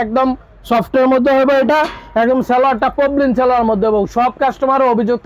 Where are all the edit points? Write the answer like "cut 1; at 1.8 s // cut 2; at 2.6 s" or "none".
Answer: none